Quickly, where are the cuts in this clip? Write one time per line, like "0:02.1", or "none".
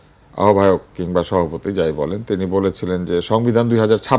none